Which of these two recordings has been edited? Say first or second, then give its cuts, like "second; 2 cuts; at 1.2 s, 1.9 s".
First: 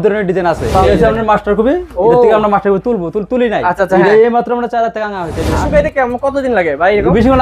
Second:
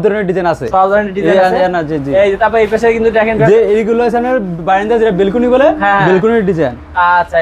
first; 2 cuts; at 0.7 s, 5.5 s